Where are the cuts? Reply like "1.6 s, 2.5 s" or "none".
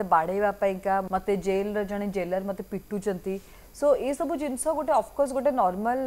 1.0 s